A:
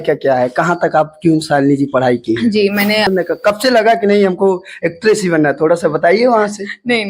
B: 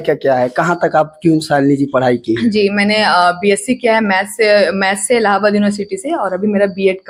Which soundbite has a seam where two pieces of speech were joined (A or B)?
A